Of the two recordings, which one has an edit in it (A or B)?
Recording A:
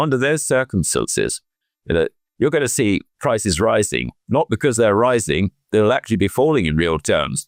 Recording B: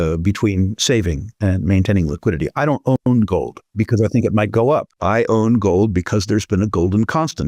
B